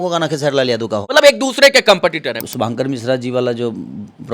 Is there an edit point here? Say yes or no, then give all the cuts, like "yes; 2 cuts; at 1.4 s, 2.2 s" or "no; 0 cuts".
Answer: yes; 2 cuts; at 1.0 s, 2.4 s